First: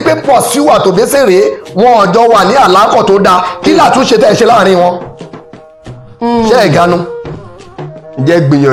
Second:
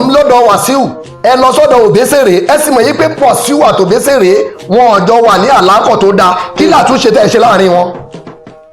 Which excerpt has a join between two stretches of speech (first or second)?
second